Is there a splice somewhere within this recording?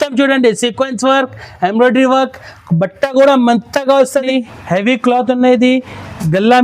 yes; 1 cut; at 4.3 s

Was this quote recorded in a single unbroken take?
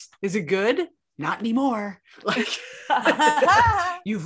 yes; 0 cuts

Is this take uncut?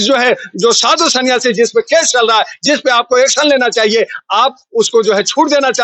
yes; 0 cuts

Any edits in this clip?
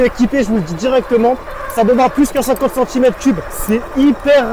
yes; 1 cut; at 3.5 s

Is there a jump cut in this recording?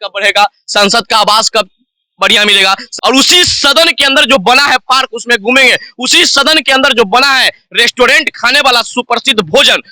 yes; 1 cut; at 2.9 s

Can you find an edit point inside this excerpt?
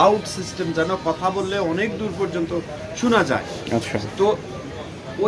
no; 0 cuts

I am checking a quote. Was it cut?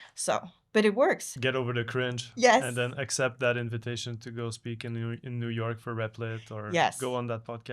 yes; 1 cut; at 1.3 s

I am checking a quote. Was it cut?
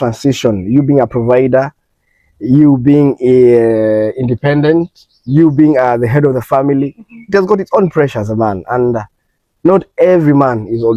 no; 0 cuts

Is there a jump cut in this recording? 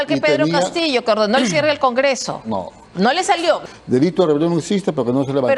yes; 1 cut; at 3.6 s

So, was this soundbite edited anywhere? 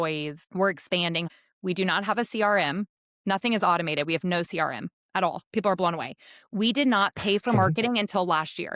yes; 1 cut; at 1.3 s

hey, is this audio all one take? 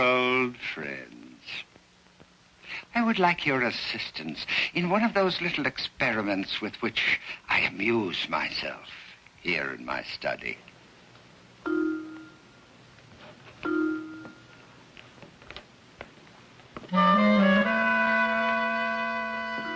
yes; 0 cuts

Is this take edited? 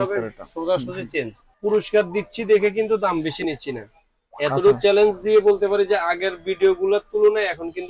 yes; 1 cut; at 1.4 s

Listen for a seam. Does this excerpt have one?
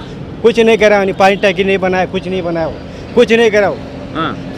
no; 0 cuts

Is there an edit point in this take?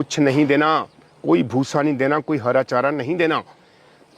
no; 0 cuts

